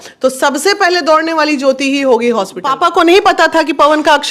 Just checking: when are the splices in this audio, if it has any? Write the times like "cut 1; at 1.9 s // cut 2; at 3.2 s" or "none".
cut 1; at 2.6 s